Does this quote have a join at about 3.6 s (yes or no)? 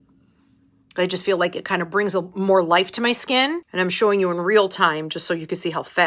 yes